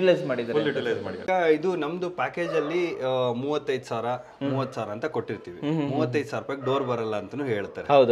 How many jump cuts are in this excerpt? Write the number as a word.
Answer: one